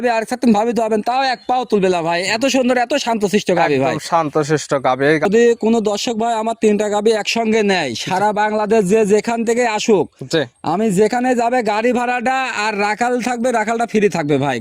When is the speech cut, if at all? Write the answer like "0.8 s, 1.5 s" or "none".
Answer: 5.2 s